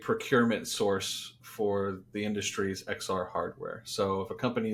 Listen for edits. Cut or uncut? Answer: uncut